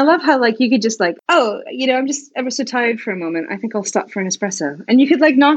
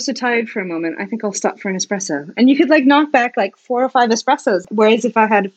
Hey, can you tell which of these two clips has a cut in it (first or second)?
second